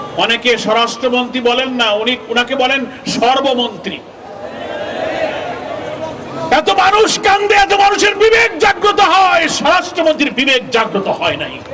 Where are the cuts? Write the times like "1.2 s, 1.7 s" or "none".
none